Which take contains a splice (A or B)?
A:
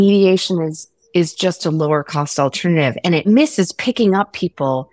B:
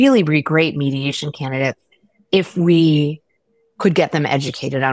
A